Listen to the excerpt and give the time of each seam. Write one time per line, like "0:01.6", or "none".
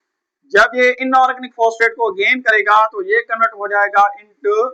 none